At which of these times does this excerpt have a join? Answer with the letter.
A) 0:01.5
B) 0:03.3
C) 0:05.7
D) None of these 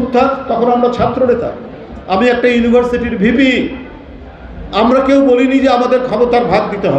D